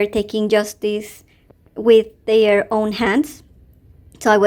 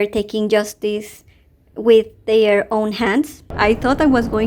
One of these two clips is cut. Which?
second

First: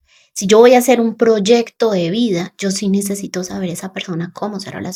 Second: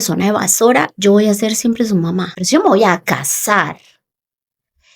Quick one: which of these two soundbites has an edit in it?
second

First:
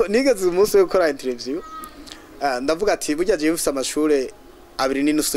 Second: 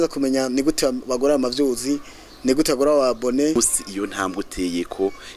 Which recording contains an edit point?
second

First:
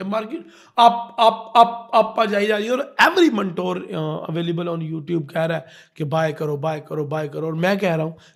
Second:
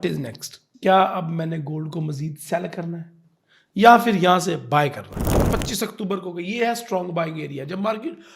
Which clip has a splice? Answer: second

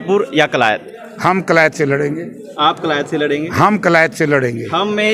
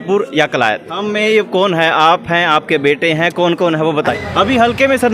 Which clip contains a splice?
second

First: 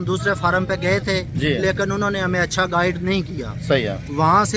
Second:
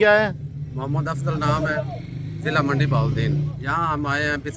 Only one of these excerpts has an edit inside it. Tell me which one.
second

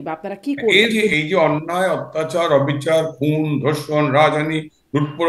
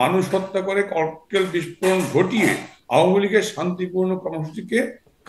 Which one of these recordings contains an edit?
first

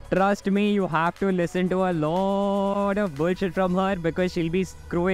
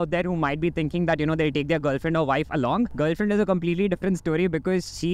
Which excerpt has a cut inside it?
second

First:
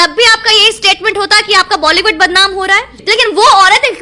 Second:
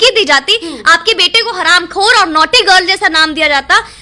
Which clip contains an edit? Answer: first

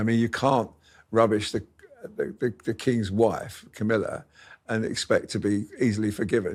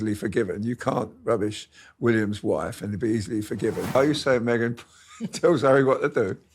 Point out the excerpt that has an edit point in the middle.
second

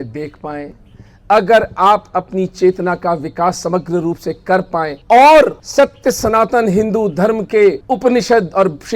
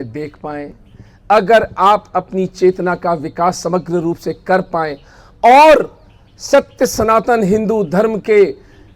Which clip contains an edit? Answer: first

